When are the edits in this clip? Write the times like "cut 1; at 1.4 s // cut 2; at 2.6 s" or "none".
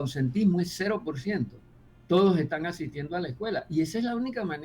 none